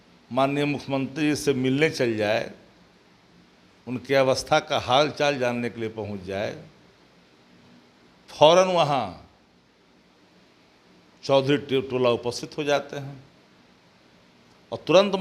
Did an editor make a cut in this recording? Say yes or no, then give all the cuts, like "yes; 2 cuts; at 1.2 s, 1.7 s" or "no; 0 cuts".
no; 0 cuts